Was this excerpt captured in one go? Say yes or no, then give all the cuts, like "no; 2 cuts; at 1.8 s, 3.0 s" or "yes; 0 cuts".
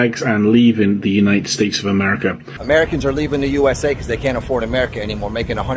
no; 1 cut; at 2.5 s